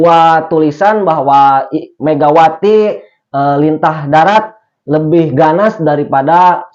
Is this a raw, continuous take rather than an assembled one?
yes; 0 cuts

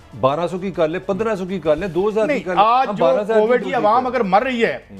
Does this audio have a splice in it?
yes; 1 cut; at 3.7 s

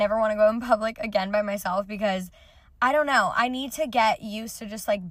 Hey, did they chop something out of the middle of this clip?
no; 0 cuts

